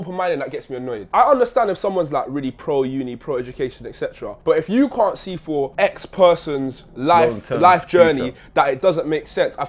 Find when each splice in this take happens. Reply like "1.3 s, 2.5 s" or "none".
1.0 s, 4.3 s, 5.7 s